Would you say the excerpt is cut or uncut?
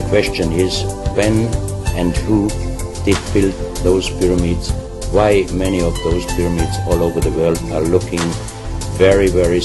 uncut